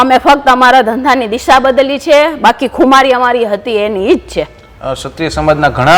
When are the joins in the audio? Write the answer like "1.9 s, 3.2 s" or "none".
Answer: none